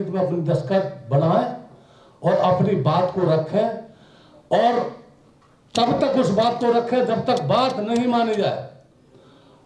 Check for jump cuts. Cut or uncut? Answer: uncut